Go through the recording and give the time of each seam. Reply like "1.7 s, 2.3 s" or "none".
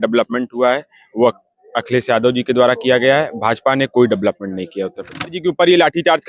5.4 s